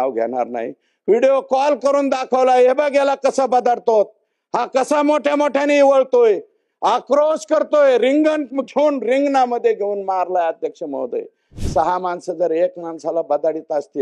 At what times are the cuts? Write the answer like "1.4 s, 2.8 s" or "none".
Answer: none